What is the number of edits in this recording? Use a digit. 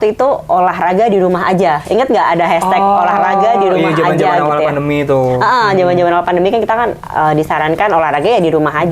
0